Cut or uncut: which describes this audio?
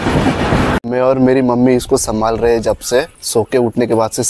cut